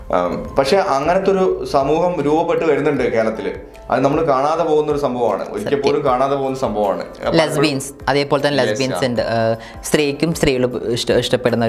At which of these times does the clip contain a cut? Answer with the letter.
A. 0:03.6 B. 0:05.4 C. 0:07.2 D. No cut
D